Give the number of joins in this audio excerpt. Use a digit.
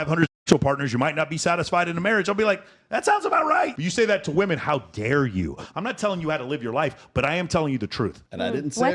2